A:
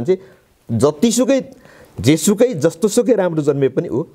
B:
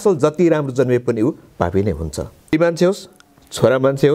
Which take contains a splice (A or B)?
B